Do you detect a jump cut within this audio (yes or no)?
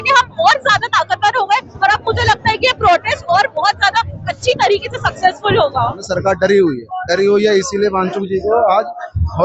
yes